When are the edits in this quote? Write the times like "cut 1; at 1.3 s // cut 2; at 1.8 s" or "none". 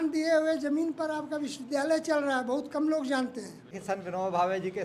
cut 1; at 3.8 s

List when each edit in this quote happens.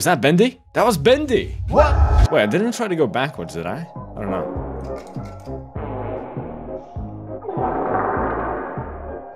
cut 1; at 2.1 s

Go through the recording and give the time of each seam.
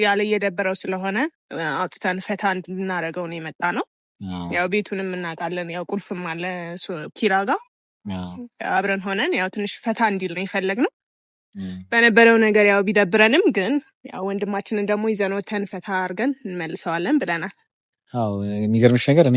none

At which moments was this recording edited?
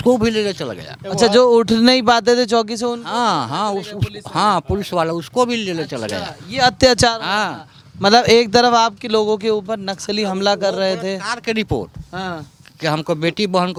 none

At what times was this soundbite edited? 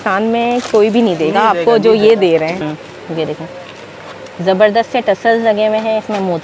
cut 1; at 2.6 s

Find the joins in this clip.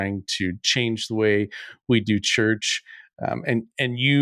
none

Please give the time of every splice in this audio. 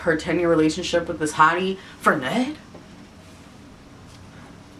none

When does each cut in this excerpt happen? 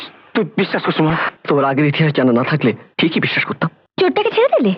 cut 1; at 2.9 s // cut 2; at 3.8 s

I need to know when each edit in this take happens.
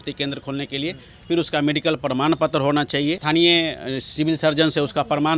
cut 1; at 3.2 s

